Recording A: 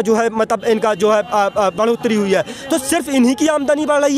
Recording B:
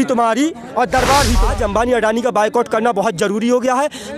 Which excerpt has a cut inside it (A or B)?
B